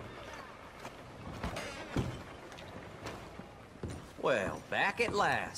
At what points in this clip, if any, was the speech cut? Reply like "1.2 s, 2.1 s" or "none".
3.6 s